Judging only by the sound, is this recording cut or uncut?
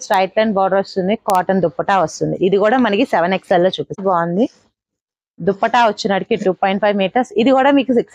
cut